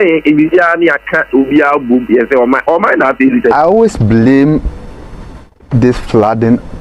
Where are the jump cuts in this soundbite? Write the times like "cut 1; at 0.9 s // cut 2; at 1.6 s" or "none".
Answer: cut 1; at 3.5 s